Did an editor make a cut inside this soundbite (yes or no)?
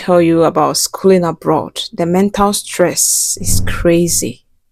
no